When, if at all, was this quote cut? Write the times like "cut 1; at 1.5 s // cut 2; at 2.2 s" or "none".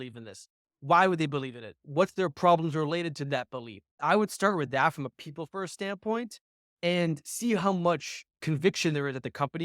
cut 1; at 3.9 s // cut 2; at 8.4 s